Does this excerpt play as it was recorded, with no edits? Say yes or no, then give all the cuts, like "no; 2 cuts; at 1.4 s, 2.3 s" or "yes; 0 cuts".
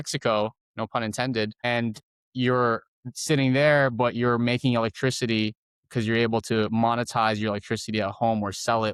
yes; 0 cuts